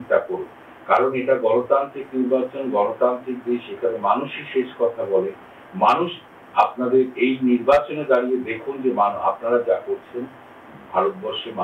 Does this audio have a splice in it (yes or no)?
no